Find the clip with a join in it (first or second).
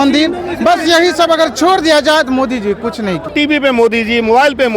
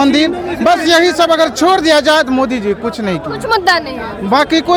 first